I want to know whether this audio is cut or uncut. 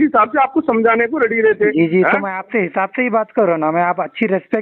uncut